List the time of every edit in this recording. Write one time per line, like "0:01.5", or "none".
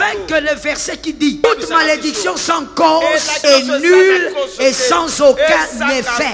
0:01.4
0:03.3